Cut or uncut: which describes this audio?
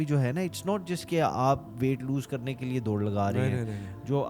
uncut